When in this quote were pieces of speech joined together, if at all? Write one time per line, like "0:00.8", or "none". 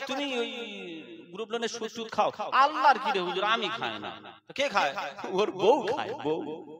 none